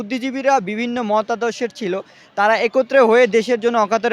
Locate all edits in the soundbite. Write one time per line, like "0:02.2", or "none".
none